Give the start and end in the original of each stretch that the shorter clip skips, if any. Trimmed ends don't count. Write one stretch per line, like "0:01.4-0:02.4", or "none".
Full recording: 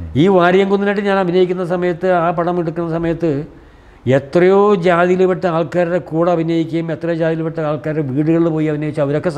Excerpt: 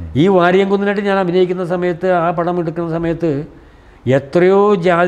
none